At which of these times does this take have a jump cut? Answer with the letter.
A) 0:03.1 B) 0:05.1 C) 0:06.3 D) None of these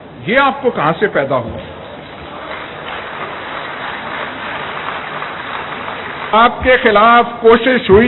C